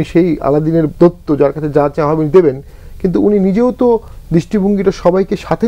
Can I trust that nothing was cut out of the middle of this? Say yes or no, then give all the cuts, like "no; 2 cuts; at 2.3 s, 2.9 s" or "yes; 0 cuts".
yes; 0 cuts